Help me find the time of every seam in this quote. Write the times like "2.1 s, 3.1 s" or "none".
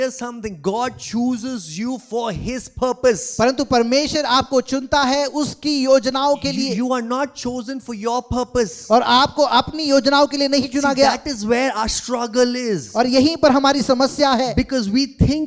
none

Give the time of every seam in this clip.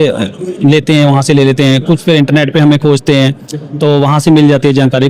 none

